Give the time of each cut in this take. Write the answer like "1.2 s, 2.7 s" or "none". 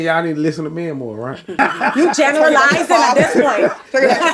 1.6 s